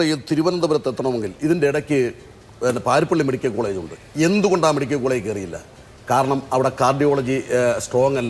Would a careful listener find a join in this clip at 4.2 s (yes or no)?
no